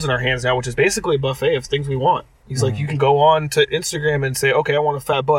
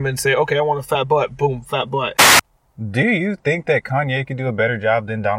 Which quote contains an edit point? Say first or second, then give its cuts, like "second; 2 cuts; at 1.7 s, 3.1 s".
second; 1 cut; at 2.2 s